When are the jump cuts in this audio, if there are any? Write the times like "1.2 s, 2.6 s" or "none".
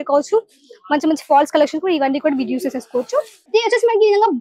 3.4 s